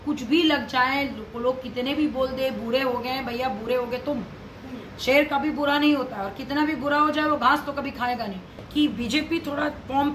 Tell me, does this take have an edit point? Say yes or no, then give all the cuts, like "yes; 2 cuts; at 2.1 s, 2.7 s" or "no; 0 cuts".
yes; 1 cut; at 8.5 s